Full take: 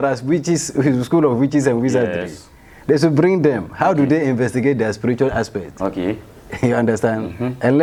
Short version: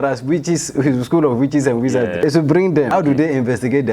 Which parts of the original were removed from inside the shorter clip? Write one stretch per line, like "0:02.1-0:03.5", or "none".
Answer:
0:02.2-0:02.9
0:03.6-0:03.8